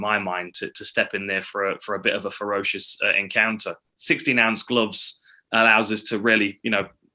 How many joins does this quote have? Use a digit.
1